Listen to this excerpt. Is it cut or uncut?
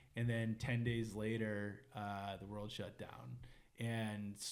uncut